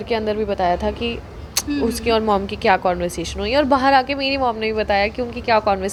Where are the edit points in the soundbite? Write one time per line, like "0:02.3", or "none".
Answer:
none